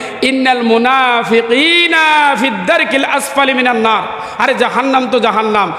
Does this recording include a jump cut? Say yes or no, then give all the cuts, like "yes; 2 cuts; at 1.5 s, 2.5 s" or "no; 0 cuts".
no; 0 cuts